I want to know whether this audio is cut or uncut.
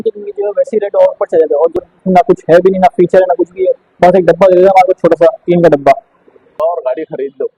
cut